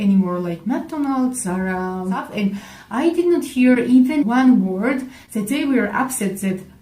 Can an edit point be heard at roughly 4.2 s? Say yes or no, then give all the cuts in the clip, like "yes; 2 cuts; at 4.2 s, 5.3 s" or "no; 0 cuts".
no; 1 cut; at 2.3 s